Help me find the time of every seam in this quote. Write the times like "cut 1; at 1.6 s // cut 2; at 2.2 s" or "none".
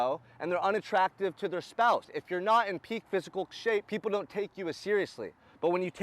cut 1; at 2.2 s // cut 2; at 3.9 s